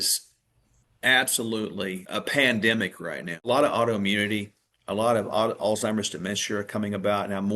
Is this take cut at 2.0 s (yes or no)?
yes